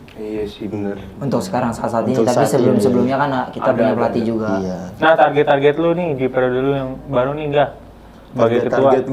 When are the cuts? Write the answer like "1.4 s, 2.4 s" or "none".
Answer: none